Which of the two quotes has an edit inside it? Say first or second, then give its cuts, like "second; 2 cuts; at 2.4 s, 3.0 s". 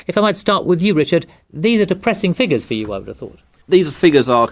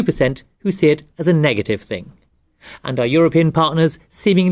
second; 1 cut; at 1.1 s